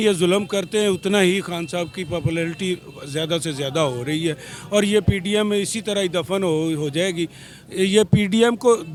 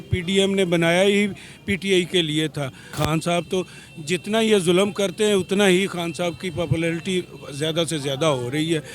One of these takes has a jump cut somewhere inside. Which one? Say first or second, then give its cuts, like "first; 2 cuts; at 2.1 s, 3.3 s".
second; 1 cut; at 2.9 s